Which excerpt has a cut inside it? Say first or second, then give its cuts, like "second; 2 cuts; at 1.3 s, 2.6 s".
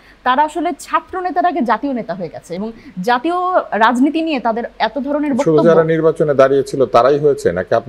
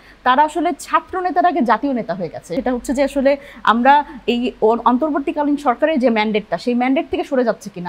second; 1 cut; at 2.5 s